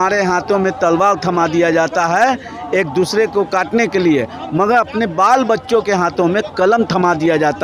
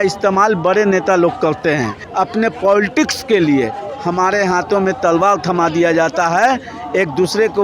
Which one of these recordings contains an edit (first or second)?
second